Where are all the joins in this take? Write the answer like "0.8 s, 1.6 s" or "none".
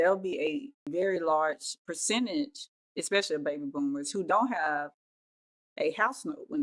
0.9 s, 1.8 s